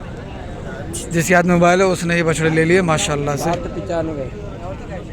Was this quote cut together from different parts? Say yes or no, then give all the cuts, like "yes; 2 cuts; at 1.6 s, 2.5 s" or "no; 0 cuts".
no; 0 cuts